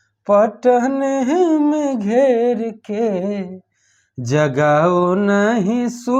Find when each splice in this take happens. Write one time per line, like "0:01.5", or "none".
none